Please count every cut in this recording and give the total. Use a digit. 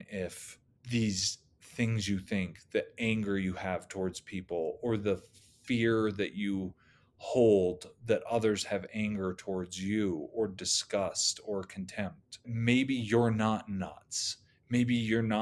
1